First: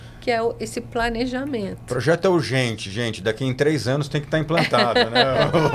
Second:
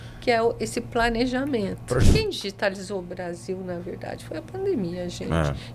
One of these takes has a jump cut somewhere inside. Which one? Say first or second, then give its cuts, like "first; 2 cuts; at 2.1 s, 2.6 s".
second; 1 cut; at 2.0 s